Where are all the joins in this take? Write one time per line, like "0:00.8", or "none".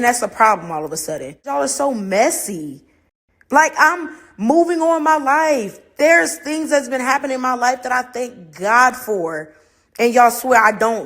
0:01.5